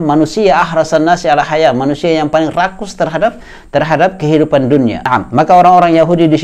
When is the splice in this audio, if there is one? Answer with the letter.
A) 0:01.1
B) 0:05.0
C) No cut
B